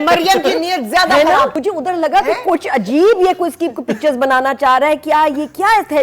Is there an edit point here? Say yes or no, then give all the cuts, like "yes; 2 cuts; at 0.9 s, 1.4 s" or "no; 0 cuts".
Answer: yes; 1 cut; at 1.6 s